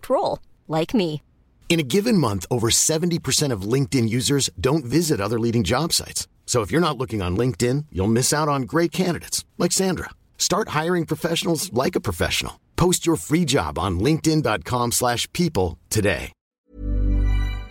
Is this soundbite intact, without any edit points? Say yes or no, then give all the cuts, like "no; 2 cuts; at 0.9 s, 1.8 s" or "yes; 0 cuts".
no; 1 cut; at 16.6 s